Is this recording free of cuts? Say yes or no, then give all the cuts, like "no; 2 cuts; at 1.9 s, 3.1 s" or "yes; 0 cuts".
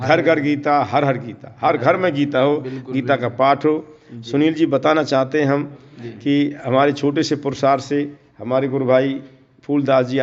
yes; 0 cuts